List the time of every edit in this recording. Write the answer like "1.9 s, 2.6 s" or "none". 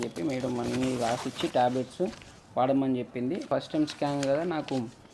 3.5 s